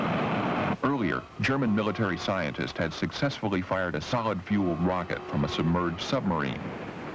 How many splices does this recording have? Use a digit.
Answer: 1